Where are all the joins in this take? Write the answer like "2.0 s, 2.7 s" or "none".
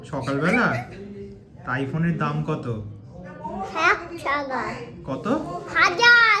none